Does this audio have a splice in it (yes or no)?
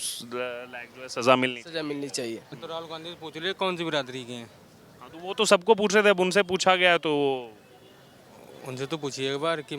yes